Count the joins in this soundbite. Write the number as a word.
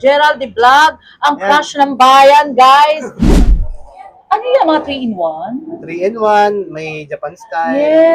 one